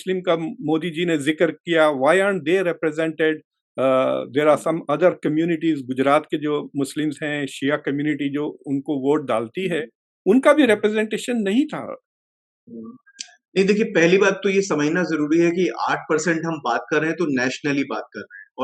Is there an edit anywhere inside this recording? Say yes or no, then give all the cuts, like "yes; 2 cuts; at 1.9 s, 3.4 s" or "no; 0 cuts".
no; 0 cuts